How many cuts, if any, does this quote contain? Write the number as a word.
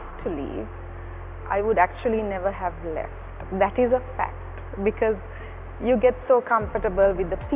zero